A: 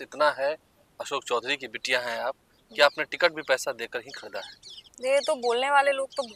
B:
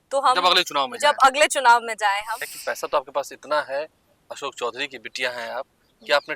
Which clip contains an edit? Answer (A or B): B